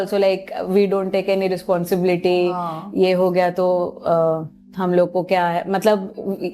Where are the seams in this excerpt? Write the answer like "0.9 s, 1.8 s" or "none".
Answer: none